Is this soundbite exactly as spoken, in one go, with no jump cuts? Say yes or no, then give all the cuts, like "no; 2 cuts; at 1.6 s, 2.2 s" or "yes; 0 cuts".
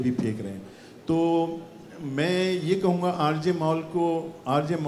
yes; 0 cuts